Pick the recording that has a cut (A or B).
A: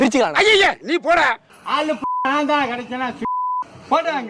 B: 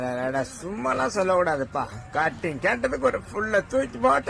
A